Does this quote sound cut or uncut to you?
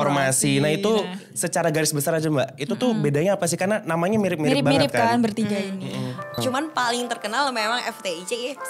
cut